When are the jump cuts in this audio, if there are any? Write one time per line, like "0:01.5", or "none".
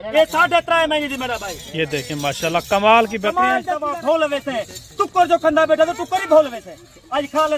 0:03.8